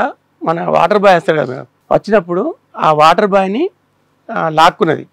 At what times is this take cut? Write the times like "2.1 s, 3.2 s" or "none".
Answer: 1.7 s